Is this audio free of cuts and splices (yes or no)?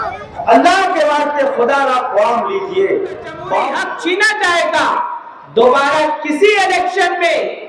no